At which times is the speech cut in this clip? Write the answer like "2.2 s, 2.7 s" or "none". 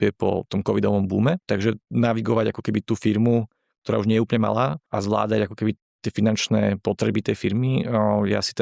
1.4 s, 4.9 s

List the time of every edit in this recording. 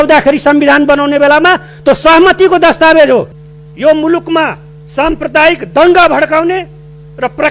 3.4 s

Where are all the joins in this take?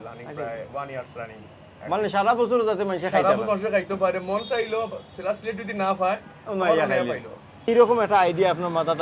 7.7 s

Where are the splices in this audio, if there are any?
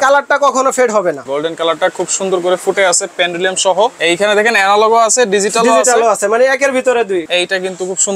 1.2 s, 4.0 s, 7.3 s

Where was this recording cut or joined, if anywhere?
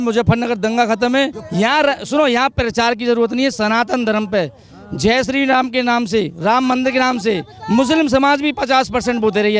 1.4 s

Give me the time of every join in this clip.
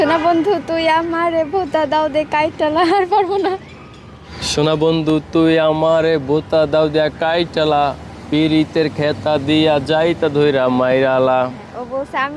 4.4 s

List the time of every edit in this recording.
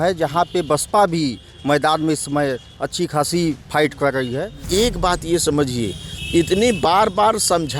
4.7 s

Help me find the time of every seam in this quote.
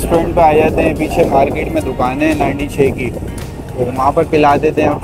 none

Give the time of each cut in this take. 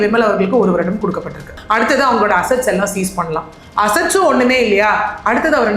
1.5 s

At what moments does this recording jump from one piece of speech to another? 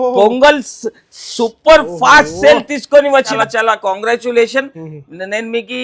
3.3 s

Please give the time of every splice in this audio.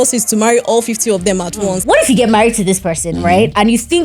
1.8 s

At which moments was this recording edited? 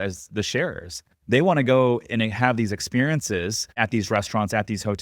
3.7 s

